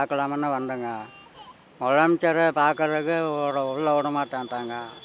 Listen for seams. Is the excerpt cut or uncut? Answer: uncut